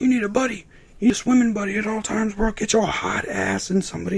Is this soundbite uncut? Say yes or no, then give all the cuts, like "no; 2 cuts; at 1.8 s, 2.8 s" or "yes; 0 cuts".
no; 1 cut; at 1.1 s